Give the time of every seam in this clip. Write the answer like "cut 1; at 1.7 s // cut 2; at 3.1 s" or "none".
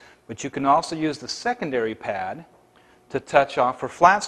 cut 1; at 3.2 s